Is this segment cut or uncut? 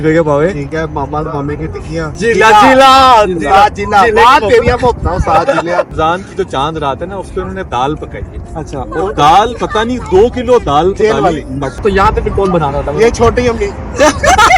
cut